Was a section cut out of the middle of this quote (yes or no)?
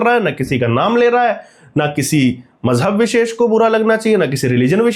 no